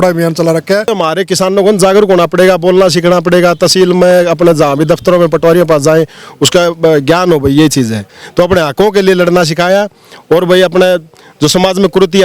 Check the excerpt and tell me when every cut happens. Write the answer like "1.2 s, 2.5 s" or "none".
0.9 s